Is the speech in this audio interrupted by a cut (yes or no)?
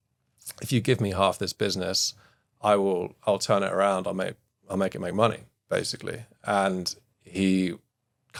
no